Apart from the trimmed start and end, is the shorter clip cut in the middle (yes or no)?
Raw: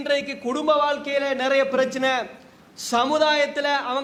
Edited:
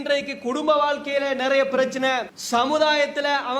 yes